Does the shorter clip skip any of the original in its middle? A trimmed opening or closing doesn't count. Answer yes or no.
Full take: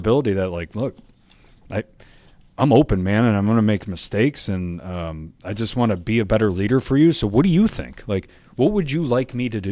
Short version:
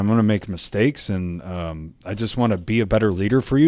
no